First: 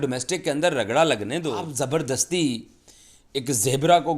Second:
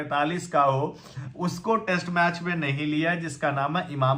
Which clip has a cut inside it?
first; 1 cut; at 1.6 s

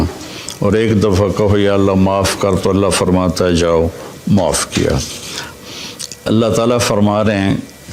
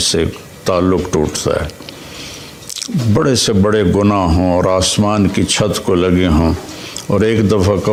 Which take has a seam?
first; 1 cut; at 5.5 s

